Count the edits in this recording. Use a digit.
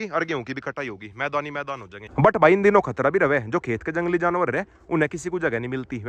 0